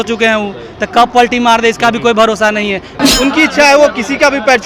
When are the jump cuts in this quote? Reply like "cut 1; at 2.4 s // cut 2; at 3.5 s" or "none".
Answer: cut 1; at 3.0 s